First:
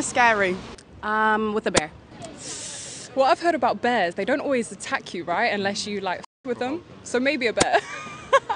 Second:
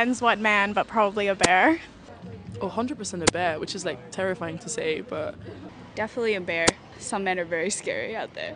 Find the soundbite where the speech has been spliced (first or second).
first